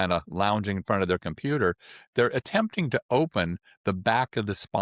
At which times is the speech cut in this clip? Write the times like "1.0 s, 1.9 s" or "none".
none